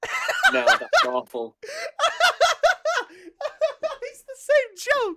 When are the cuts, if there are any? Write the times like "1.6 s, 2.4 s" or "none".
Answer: none